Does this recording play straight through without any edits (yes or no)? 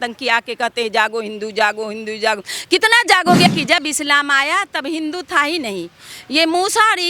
no